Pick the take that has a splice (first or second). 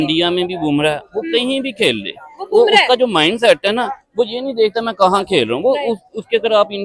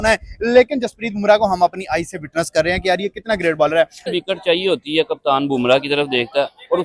second